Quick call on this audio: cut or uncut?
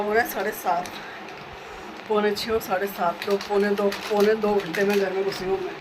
uncut